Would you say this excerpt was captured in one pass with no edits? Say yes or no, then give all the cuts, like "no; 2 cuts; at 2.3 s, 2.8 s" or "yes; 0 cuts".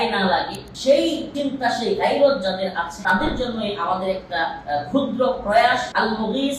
yes; 0 cuts